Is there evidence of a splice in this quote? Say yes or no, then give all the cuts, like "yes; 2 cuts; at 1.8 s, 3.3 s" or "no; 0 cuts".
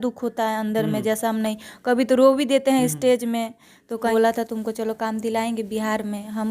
yes; 1 cut; at 4.1 s